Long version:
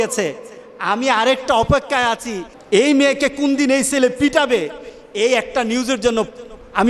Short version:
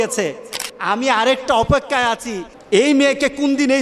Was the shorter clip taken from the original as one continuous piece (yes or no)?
yes